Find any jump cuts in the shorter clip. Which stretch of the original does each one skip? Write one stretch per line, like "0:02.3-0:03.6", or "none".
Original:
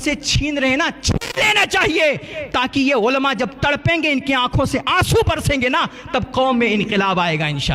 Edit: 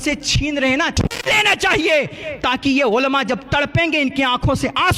0:00.9-0:01.0